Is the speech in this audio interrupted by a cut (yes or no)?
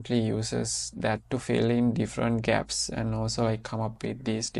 no